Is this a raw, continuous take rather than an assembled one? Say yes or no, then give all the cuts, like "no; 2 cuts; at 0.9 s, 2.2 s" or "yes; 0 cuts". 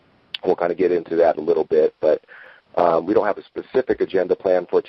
yes; 0 cuts